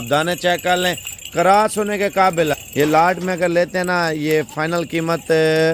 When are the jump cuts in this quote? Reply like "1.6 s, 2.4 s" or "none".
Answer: 2.5 s